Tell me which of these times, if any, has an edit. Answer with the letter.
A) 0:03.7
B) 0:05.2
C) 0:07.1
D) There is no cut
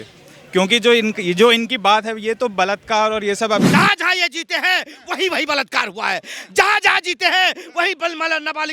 A